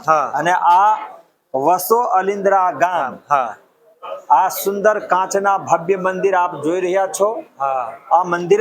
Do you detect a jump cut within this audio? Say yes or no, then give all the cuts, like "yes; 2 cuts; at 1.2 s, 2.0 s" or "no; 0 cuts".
no; 0 cuts